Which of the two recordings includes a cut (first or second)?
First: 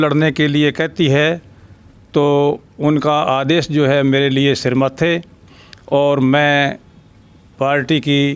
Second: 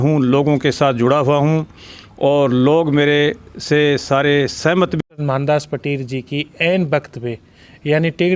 second